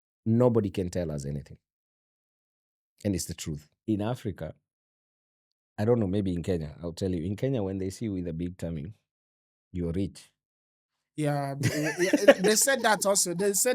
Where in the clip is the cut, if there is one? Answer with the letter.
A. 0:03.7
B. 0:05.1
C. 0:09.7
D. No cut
A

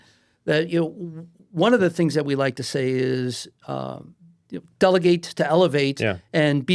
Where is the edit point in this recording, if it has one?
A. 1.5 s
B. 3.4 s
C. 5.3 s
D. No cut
D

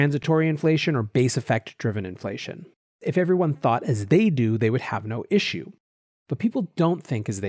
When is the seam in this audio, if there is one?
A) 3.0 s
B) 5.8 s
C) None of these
A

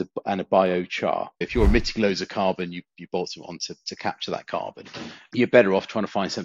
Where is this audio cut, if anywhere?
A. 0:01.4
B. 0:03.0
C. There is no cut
A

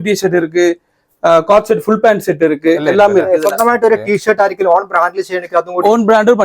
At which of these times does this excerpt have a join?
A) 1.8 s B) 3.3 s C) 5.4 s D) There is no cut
B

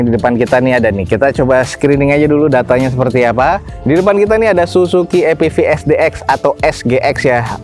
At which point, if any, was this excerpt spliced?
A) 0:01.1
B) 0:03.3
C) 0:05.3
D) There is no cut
D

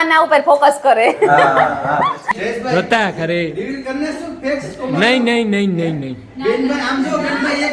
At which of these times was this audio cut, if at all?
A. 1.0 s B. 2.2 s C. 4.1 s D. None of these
B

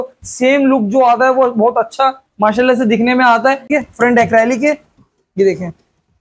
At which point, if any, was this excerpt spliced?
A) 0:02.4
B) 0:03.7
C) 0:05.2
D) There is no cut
B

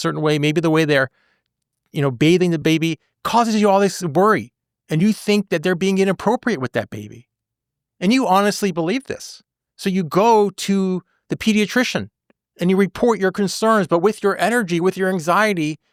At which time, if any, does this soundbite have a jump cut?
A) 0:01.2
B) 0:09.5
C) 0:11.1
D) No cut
D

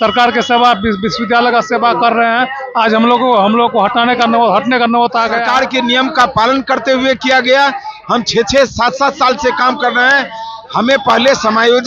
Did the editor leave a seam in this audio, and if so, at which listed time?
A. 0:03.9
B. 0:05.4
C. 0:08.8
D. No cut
B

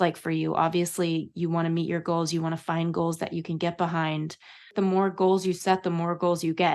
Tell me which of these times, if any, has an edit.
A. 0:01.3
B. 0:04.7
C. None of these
B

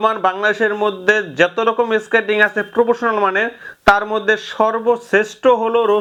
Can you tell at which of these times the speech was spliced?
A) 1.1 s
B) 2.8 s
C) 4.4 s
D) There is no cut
D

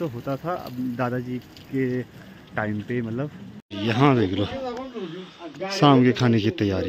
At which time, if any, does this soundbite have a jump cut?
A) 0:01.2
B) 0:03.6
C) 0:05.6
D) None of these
B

